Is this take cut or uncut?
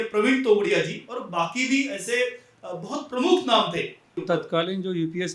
cut